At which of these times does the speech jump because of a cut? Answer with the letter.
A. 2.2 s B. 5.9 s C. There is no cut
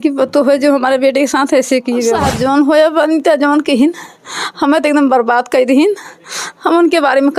A